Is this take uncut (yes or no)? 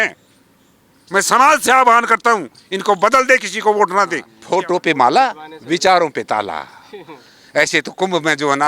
no